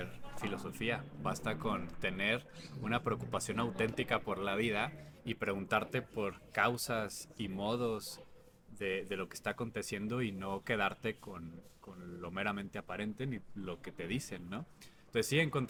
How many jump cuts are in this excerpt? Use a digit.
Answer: 0